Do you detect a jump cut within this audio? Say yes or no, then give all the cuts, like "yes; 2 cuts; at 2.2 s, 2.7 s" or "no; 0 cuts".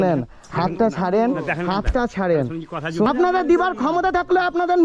yes; 1 cut; at 3.1 s